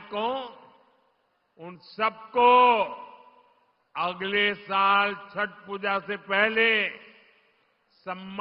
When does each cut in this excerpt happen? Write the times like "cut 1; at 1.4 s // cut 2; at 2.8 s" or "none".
none

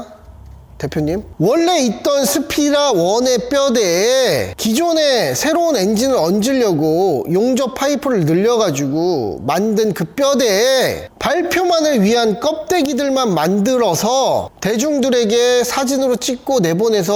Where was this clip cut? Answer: none

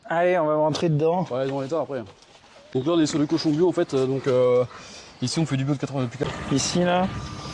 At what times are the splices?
cut 1; at 2.6 s // cut 2; at 6.2 s

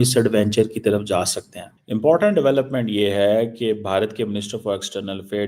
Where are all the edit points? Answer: cut 1; at 1.9 s

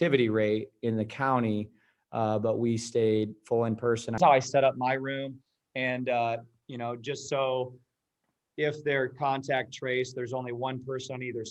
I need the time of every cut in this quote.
cut 1; at 4.2 s

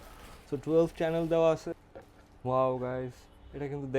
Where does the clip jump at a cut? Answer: cut 1; at 1.8 s

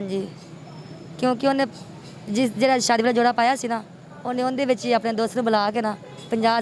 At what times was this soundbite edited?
none

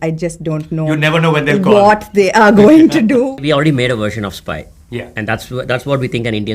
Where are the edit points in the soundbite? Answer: cut 1; at 3.3 s

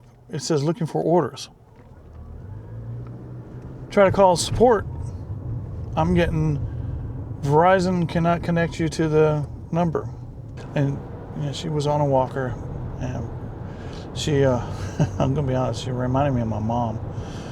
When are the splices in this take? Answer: cut 1; at 10.6 s

